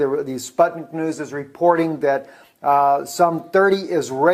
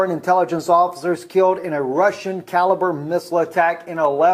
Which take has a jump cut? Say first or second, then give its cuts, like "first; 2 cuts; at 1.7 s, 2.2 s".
second; 1 cut; at 3.0 s